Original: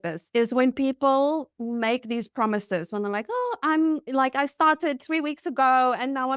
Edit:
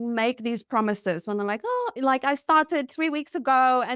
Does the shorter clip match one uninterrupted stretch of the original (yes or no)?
no